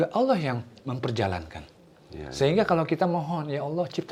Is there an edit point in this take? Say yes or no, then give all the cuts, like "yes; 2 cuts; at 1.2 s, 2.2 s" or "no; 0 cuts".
no; 0 cuts